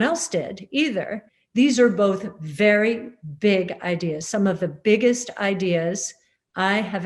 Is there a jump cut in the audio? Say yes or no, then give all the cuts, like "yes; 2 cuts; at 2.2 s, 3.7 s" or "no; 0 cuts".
yes; 1 cut; at 1.2 s